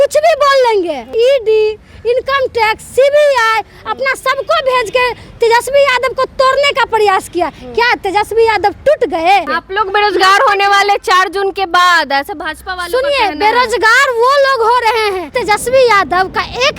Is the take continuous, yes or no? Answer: no